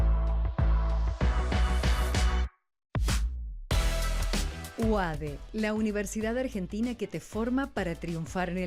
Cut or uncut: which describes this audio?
cut